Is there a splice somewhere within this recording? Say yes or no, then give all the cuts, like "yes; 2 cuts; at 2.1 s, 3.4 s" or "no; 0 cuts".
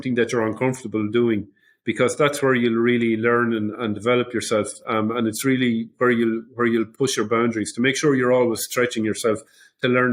no; 0 cuts